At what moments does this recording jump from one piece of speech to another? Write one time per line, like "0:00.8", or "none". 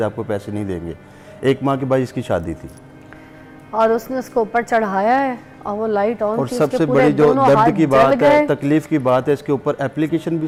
none